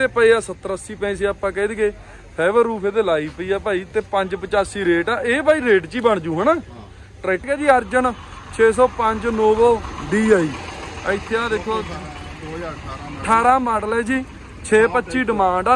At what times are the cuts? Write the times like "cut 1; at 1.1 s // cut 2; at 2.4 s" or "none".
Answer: cut 1; at 7.5 s

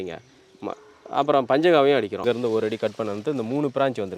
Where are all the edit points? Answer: cut 1; at 2.2 s

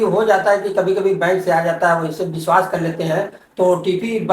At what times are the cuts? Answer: none

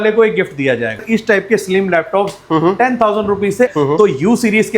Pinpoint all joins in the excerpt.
cut 1; at 1.0 s // cut 2; at 3.7 s

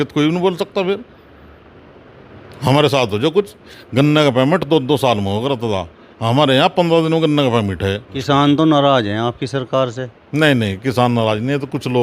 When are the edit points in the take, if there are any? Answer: cut 1; at 3.7 s // cut 2; at 8.1 s

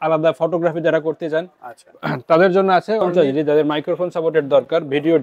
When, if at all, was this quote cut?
cut 1; at 3.1 s

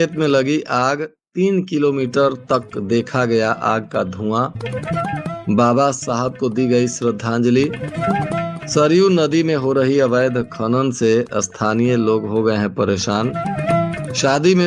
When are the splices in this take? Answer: none

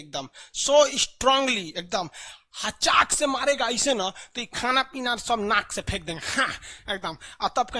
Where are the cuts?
none

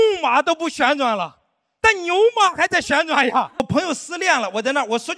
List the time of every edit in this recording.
cut 1; at 3.6 s

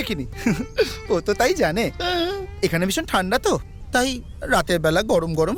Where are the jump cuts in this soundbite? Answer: none

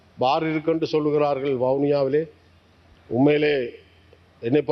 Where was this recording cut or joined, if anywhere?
none

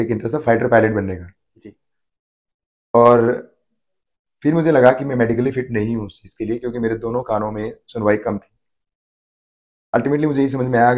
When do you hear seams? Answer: none

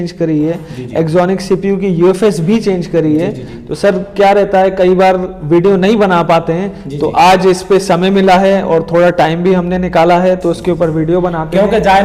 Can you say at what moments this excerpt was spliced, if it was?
none

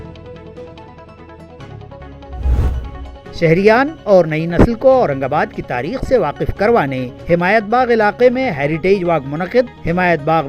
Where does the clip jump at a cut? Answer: cut 1; at 2.6 s

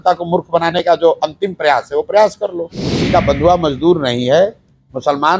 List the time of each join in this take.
cut 1; at 2.9 s

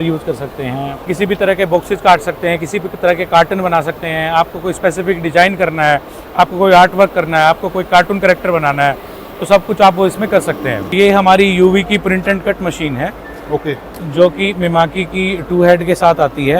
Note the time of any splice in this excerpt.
cut 1; at 1.1 s // cut 2; at 10.9 s

